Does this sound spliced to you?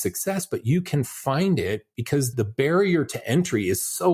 yes; 1 cut; at 2.3 s

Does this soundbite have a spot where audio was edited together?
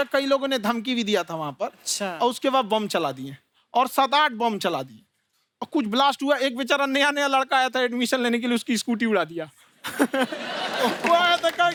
no; 0 cuts

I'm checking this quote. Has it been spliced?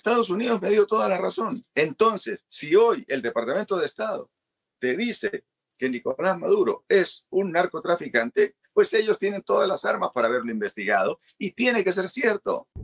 no; 0 cuts

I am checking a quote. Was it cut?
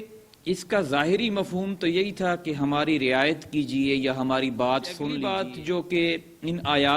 yes; 1 cut; at 5.2 s

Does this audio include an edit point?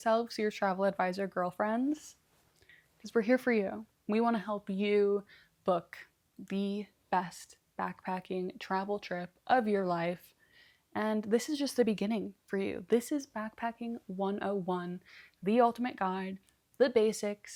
no; 0 cuts

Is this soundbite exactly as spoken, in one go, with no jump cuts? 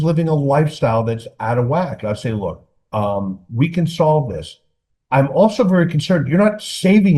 yes; 0 cuts

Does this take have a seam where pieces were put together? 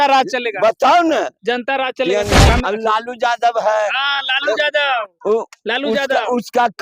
yes; 1 cut; at 2.5 s

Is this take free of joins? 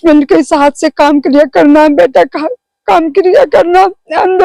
yes; 0 cuts

